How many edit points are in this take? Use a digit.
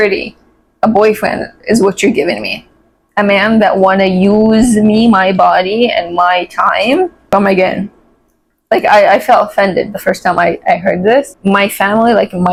0